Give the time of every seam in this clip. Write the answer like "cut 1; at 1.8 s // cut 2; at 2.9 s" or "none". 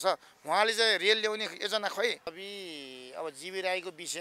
cut 1; at 2.4 s